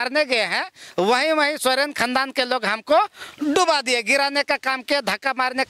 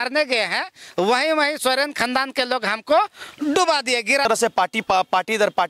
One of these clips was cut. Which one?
second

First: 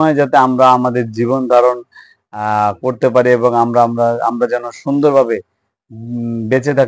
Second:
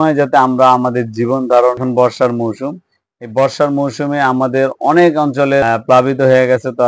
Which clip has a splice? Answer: second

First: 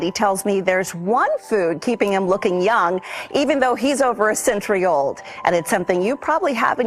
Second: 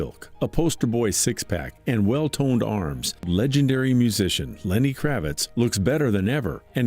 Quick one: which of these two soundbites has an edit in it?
second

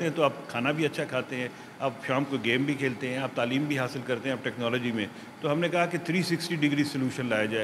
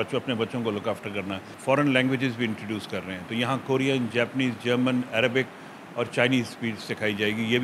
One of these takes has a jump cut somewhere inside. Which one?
second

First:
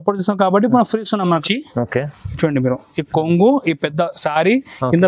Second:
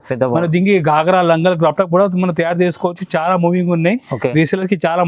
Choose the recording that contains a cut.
first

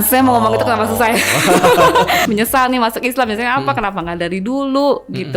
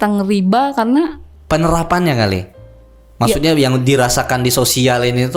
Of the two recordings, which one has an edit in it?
first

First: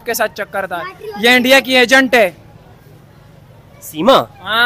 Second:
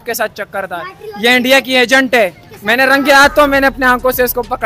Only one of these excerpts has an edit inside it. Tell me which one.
second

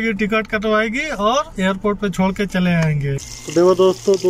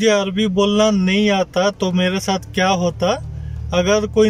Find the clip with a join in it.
first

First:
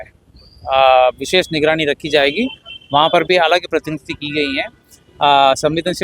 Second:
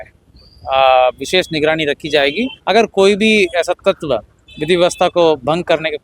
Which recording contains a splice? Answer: second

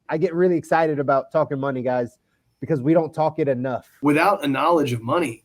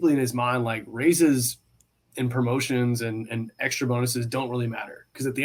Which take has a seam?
first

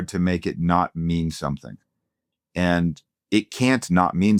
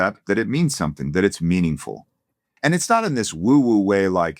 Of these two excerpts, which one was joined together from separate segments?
second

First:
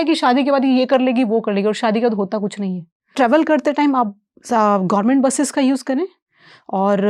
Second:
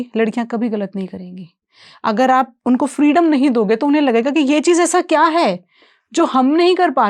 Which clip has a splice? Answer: first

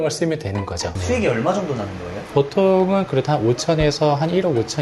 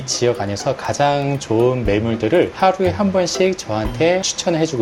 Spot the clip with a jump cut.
first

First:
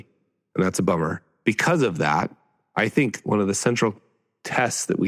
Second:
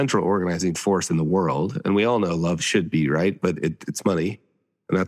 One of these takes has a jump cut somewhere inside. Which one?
first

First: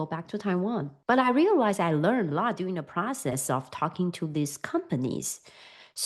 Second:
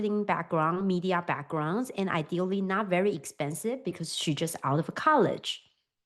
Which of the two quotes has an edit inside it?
first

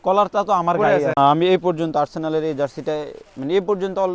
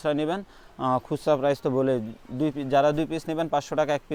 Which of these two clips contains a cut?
first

